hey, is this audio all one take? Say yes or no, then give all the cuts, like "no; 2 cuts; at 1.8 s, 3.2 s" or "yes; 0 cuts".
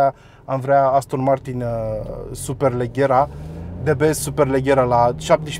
yes; 0 cuts